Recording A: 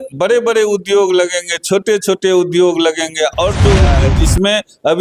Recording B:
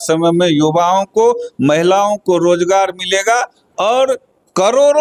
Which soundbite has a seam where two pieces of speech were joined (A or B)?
A